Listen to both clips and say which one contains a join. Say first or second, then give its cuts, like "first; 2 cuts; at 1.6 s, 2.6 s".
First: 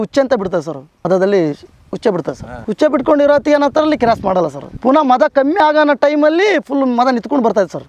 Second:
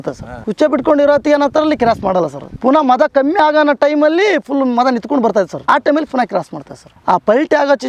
second; 1 cut; at 6.9 s